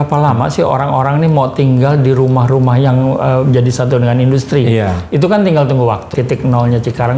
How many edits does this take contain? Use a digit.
1